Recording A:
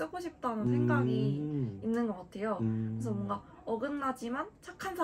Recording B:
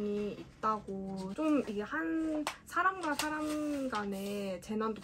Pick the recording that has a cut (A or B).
B